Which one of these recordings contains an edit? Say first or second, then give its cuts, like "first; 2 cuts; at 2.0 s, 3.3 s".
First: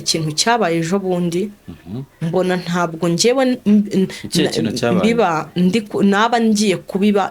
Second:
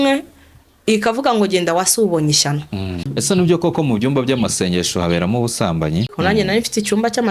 second; 2 cuts; at 3.1 s, 6.1 s